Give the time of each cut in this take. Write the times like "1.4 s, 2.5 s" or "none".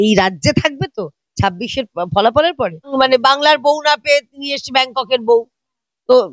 2.9 s